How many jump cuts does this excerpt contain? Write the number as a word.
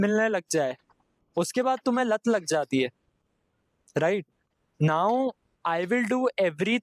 zero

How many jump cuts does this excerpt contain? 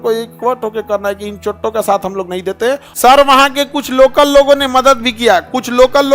one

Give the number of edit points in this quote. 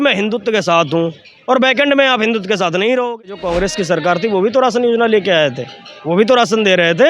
one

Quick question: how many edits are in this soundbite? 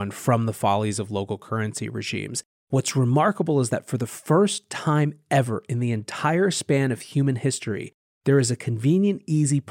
one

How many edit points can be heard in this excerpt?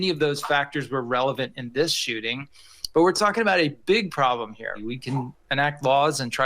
one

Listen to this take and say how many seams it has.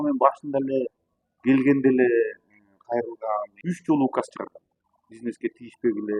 one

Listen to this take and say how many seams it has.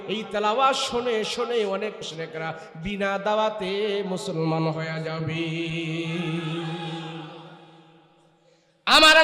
one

